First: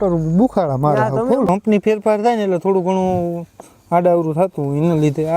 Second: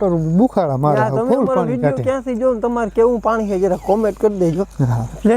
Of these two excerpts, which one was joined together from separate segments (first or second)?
first